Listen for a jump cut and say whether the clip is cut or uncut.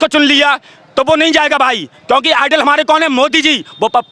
uncut